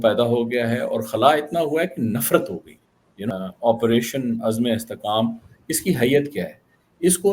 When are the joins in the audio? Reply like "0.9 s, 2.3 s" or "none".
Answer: 3.4 s